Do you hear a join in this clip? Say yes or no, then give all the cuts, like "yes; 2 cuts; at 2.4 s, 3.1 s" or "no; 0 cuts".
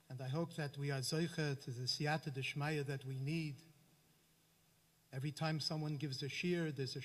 no; 0 cuts